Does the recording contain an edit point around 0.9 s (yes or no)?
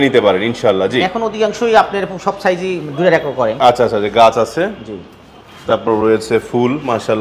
no